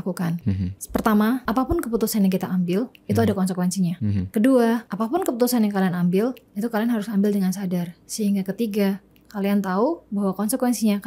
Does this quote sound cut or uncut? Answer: uncut